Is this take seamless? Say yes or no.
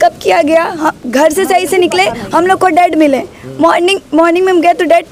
yes